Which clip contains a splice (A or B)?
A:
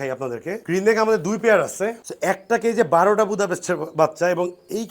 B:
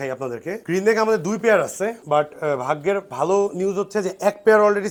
A